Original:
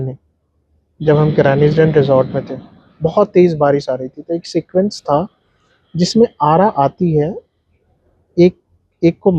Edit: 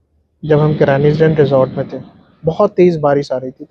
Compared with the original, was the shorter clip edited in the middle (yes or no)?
no